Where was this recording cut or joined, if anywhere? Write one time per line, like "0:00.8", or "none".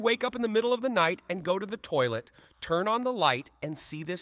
none

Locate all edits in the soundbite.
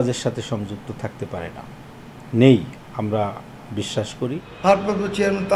0:04.5

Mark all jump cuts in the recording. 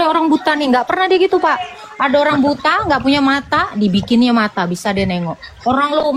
none

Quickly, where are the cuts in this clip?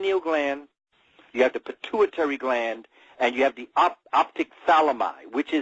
none

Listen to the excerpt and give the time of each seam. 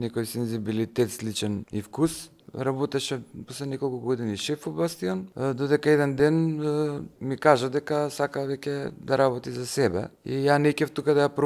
0:07.2

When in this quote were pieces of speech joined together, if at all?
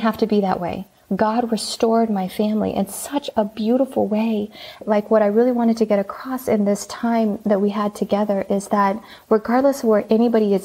0:04.8

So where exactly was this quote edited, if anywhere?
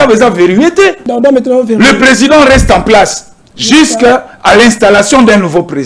0:01.0

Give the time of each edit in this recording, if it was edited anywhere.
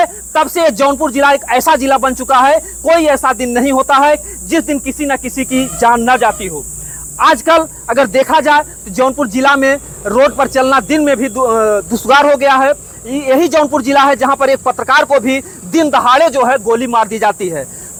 none

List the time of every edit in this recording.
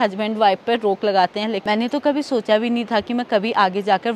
0:01.7

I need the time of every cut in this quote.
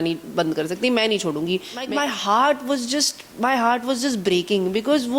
0:01.8

